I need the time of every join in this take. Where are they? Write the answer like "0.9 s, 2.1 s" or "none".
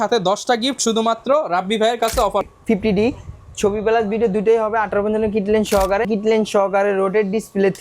2.5 s, 6.1 s